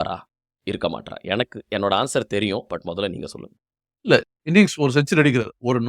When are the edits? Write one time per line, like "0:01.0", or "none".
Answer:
0:04.2